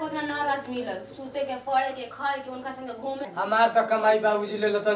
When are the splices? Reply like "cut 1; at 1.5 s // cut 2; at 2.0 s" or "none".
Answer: cut 1; at 3.3 s